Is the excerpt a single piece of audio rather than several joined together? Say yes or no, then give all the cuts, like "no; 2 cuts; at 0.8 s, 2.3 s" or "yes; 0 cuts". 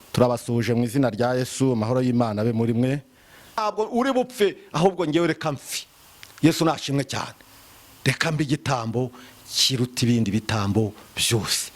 no; 1 cut; at 3.6 s